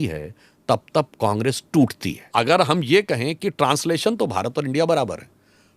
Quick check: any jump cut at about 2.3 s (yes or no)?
yes